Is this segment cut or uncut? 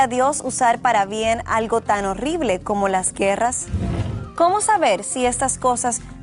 uncut